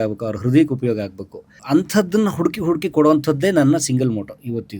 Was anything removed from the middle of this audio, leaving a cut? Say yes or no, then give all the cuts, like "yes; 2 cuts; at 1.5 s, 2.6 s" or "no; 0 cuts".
yes; 1 cut; at 1.6 s